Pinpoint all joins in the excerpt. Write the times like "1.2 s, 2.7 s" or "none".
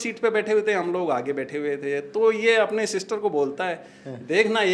none

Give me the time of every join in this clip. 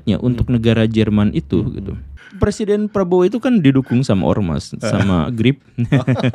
2.2 s

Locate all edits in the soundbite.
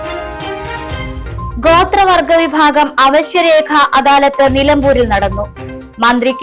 1.1 s

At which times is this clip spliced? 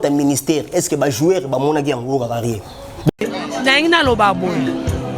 3.1 s

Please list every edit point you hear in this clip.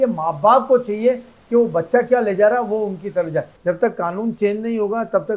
3.5 s

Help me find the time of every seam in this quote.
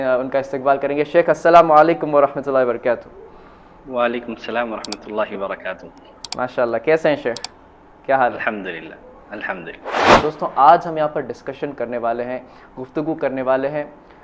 10.0 s

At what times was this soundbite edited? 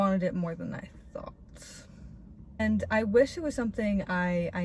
2.6 s

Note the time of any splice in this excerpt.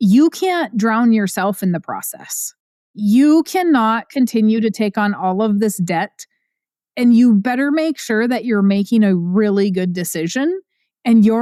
none

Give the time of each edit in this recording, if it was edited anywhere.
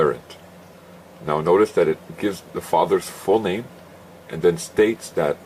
4.4 s

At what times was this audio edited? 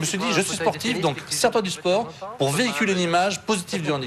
none

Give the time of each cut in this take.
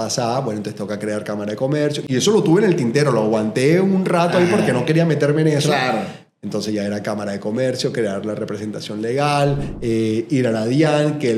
none

